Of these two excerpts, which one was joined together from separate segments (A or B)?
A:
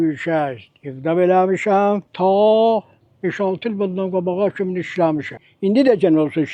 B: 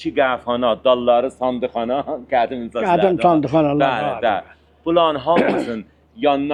A